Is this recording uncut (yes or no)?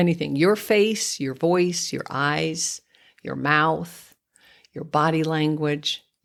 yes